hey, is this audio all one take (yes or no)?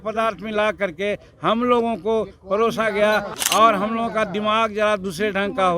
no